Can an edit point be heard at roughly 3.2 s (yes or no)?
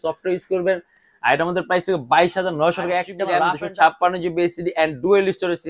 yes